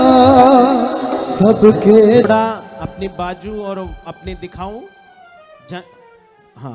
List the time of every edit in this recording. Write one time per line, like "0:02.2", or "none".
0:02.2